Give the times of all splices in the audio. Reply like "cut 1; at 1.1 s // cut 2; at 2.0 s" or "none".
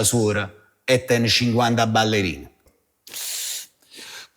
cut 1; at 2.7 s